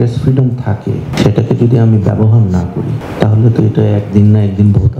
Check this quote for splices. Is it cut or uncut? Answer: cut